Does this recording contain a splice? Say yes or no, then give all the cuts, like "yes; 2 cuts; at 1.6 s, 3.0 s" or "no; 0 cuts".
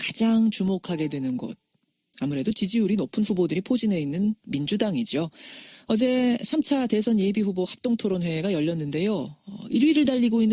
no; 0 cuts